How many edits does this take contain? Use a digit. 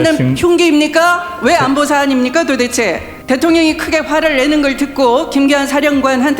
1